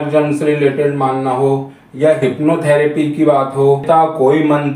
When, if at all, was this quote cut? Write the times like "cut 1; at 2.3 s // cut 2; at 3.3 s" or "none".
cut 1; at 3.8 s